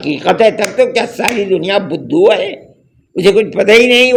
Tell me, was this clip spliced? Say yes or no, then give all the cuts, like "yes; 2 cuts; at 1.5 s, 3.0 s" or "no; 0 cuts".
no; 0 cuts